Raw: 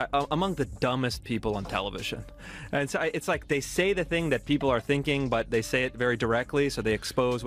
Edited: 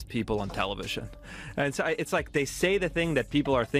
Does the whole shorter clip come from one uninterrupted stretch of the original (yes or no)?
yes